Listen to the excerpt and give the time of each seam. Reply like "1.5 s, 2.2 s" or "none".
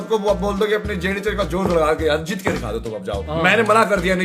3.2 s